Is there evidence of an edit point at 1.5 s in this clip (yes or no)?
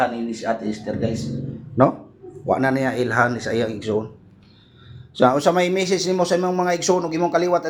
no